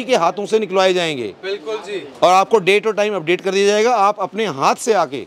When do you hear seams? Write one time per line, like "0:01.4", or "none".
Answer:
none